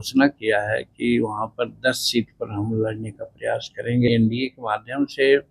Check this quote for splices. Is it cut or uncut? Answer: cut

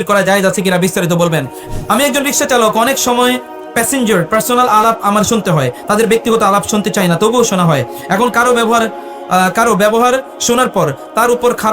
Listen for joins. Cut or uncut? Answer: cut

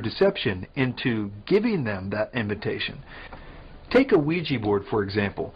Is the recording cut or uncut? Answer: cut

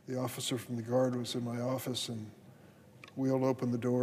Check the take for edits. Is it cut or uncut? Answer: uncut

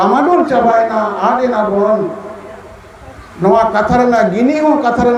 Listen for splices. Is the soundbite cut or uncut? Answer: uncut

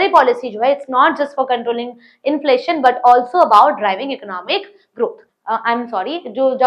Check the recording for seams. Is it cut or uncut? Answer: cut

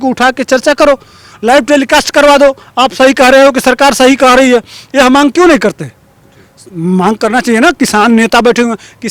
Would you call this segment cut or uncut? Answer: uncut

